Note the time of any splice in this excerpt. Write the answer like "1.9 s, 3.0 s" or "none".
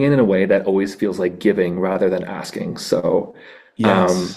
none